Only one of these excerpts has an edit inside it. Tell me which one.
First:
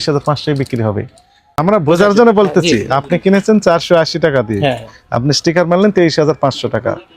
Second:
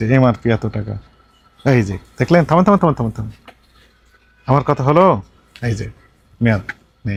first; 1 cut; at 1.6 s

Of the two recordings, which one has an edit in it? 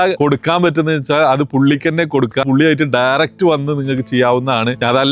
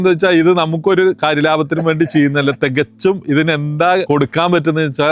first; 1 cut; at 2.4 s

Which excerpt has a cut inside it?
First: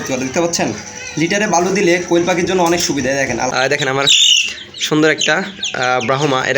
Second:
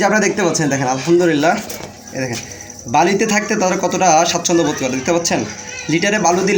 first; 1 cut; at 3.5 s

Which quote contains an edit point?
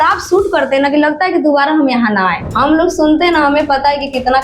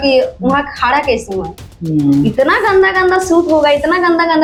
first; 1 cut; at 2.4 s

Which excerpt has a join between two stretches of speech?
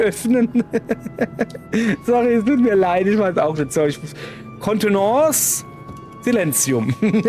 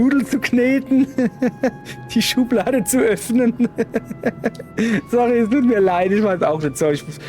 second; 1 cut; at 1.8 s

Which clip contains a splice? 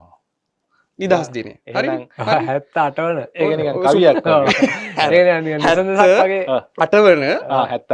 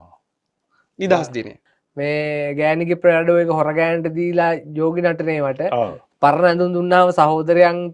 second; 1 cut; at 1.6 s

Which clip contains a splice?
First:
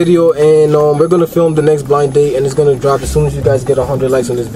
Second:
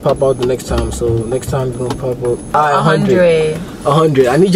second; 1 cut; at 2.4 s

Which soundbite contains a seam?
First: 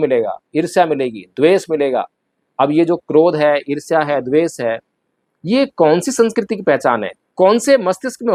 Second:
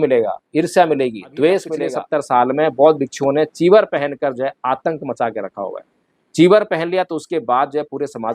second; 1 cut; at 1.9 s

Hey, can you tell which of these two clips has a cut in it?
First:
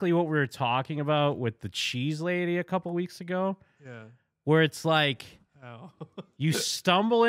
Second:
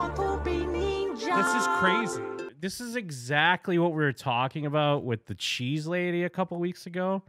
second; 1 cut; at 2.4 s

